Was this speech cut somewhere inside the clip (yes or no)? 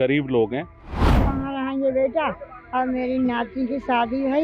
yes